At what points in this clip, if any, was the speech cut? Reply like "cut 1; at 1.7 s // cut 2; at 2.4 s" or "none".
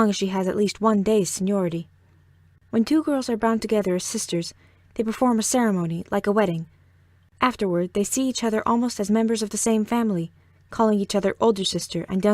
cut 1; at 10.2 s